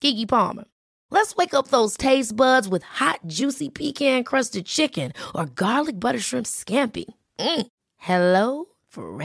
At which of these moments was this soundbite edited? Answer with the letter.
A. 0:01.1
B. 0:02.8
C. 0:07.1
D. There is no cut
D